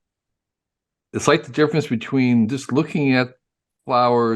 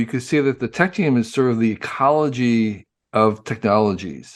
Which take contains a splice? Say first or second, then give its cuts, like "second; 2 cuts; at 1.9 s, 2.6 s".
first; 1 cut; at 1.1 s